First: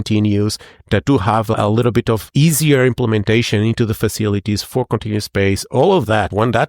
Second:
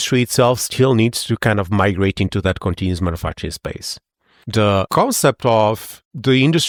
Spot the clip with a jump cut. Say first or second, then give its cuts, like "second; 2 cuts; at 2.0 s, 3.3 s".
first; 1 cut; at 1.5 s